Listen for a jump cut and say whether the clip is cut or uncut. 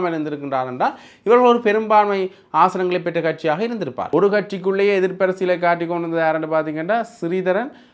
cut